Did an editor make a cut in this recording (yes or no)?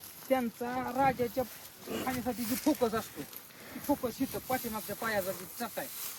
no